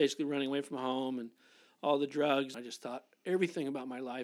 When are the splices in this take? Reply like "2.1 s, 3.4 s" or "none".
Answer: 2.6 s